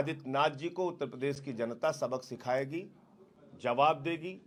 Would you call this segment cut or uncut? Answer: uncut